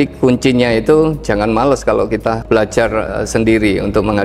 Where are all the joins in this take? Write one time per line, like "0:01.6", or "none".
none

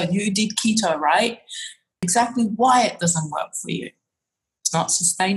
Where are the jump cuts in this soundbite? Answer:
0:02.0

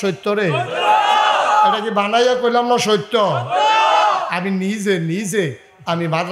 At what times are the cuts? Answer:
none

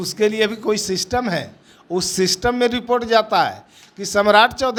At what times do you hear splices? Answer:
none

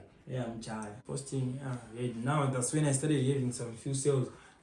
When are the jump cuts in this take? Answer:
0:01.0

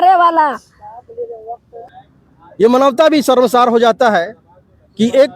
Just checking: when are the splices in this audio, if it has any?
0:01.9

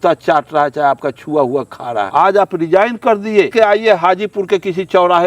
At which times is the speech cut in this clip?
0:02.1
0:03.5

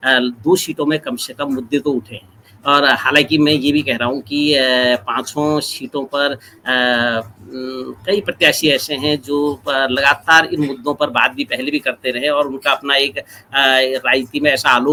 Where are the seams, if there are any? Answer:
none

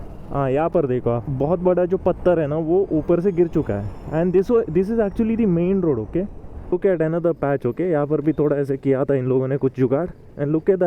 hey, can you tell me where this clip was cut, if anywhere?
0:06.7

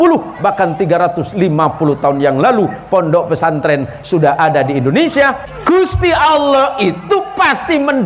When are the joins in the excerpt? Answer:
0:05.4

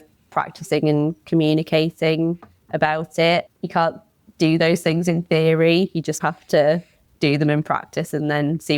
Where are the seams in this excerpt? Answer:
0:03.4
0:06.2

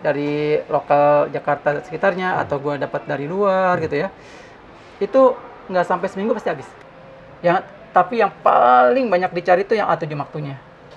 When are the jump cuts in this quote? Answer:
0:06.7

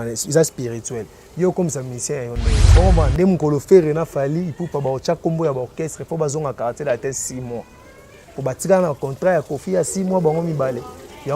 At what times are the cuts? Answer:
0:02.6

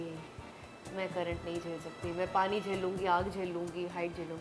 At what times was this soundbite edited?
none

